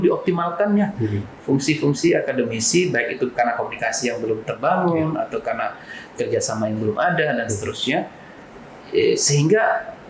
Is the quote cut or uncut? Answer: uncut